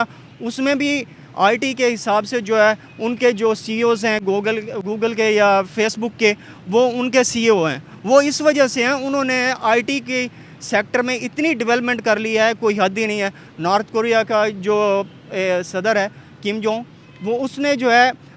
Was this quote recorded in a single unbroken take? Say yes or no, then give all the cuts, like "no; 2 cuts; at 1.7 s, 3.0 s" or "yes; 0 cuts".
yes; 0 cuts